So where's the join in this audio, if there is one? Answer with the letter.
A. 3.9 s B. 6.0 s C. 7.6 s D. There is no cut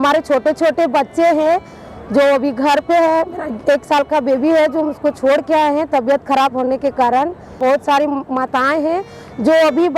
C